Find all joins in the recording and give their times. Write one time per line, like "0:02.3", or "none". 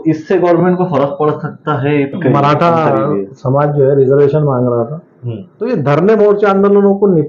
0:02.1
0:05.6